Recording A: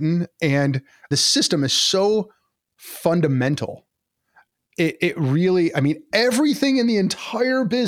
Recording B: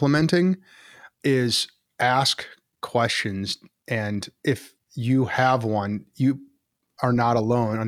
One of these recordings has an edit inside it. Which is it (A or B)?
A